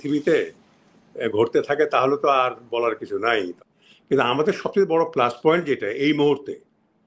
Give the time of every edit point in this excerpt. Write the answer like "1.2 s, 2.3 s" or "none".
3.6 s